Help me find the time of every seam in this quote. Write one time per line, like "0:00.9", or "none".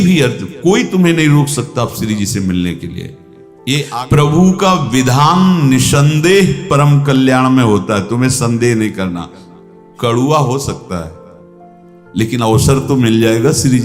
0:03.9